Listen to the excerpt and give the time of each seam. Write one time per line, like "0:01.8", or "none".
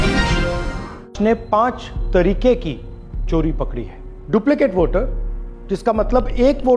0:01.1